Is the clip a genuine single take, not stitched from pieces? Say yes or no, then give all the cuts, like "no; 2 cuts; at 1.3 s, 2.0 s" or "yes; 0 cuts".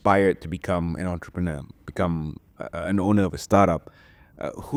yes; 0 cuts